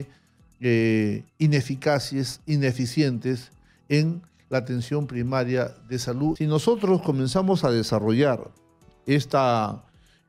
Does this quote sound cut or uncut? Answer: cut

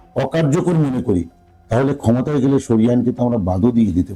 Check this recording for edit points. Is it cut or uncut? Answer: uncut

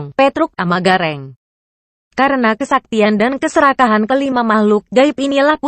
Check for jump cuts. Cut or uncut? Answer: cut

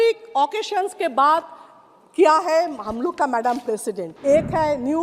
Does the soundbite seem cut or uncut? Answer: cut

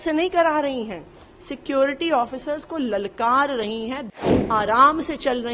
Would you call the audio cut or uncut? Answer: cut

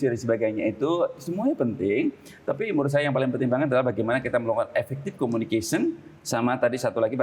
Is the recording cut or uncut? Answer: uncut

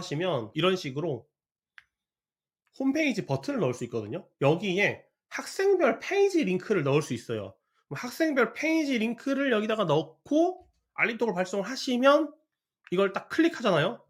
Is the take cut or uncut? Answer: uncut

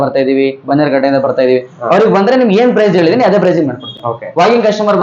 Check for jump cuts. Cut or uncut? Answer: uncut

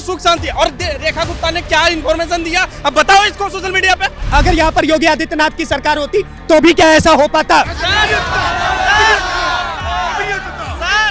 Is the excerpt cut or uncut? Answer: cut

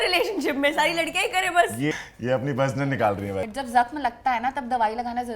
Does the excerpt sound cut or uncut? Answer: cut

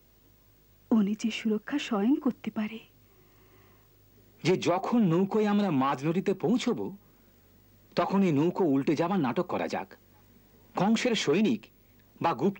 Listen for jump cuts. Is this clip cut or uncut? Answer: cut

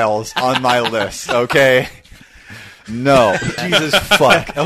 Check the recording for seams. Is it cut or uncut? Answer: cut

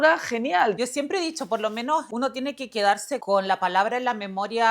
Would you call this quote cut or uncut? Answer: cut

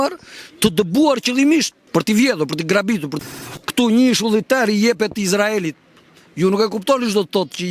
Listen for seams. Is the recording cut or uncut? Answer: cut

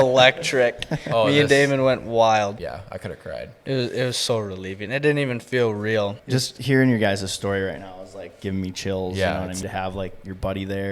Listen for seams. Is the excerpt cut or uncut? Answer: cut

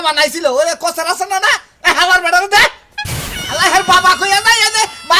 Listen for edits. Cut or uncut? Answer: uncut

